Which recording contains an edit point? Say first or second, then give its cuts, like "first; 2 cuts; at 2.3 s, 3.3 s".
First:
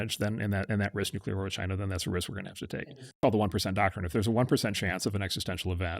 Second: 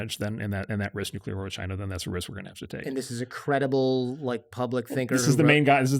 first; 1 cut; at 3.2 s